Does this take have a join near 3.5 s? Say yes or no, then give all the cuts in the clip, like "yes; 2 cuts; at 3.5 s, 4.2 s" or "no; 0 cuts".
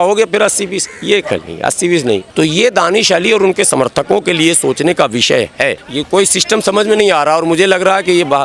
no; 2 cuts; at 2.3 s, 5.9 s